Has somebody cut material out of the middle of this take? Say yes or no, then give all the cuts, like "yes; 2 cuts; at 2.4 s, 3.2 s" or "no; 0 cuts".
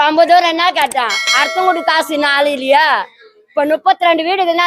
no; 0 cuts